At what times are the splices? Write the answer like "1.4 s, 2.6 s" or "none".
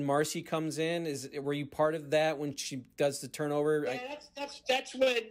none

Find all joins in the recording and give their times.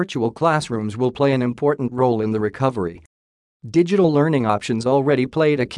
none

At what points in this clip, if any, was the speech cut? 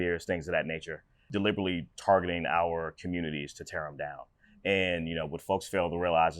1.2 s

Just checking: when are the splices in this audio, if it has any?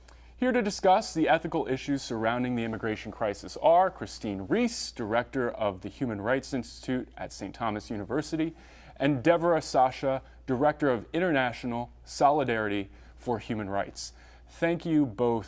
1.3 s

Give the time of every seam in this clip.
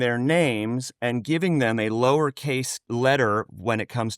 2.9 s

